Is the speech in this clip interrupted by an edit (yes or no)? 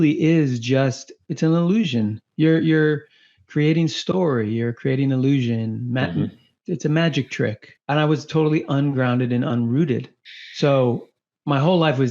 yes